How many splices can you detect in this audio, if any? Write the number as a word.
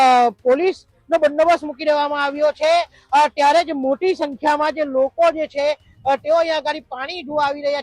zero